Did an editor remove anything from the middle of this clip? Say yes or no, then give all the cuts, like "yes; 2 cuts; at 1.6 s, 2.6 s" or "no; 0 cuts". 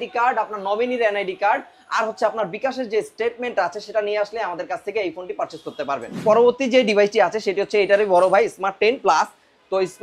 yes; 1 cut; at 6.2 s